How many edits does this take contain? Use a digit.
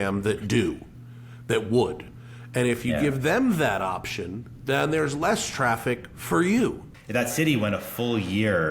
1